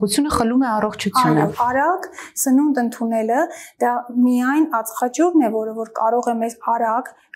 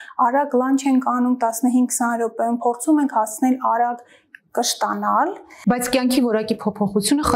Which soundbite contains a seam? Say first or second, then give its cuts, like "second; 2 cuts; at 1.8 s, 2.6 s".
first; 1 cut; at 1.5 s